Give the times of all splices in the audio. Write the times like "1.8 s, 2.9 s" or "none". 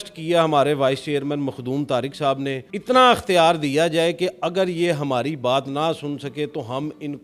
2.7 s